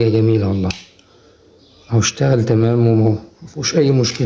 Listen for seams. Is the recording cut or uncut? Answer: uncut